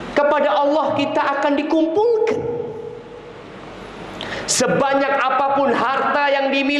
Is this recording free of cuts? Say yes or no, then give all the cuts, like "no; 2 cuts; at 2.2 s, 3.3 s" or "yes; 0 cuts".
yes; 0 cuts